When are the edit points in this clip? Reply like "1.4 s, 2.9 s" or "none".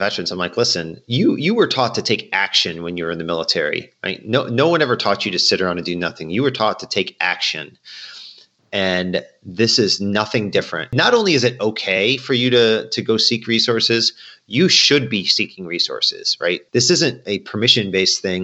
10.9 s, 16.6 s